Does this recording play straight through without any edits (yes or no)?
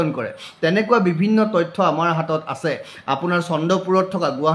yes